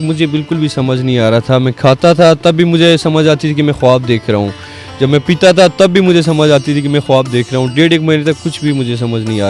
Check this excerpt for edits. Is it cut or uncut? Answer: uncut